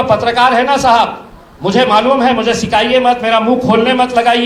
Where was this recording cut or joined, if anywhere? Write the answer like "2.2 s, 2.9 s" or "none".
none